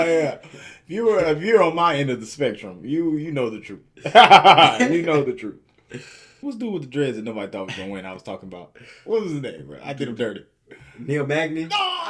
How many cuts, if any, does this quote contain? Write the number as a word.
one